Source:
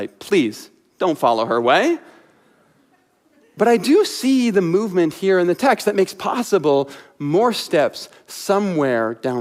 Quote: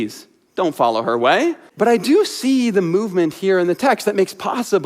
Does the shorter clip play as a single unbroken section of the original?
no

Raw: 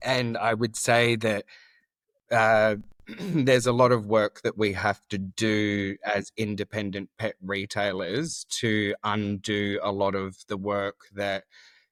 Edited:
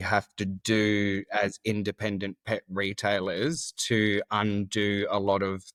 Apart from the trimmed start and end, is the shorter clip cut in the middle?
no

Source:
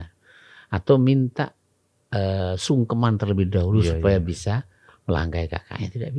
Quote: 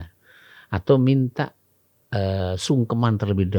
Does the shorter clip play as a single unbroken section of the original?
yes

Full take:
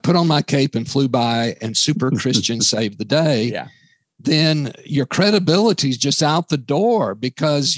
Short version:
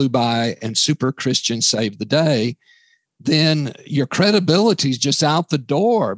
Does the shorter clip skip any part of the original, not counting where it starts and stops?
no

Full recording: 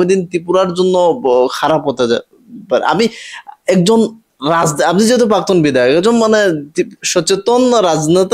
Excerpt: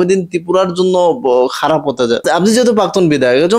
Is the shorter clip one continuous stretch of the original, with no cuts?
no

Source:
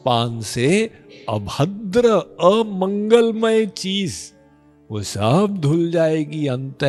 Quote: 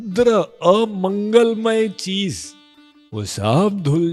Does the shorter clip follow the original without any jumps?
yes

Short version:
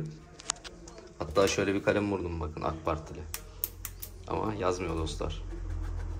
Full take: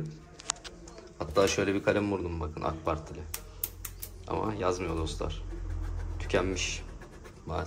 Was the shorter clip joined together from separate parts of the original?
no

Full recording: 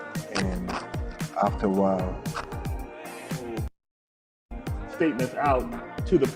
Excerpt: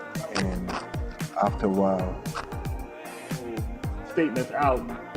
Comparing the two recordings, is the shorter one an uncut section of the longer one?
no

